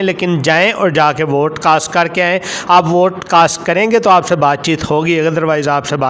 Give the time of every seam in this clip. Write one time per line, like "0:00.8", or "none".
none